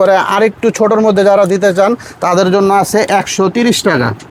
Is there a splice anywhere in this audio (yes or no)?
no